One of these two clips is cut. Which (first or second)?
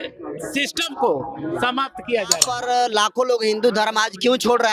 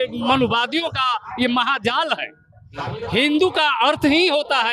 first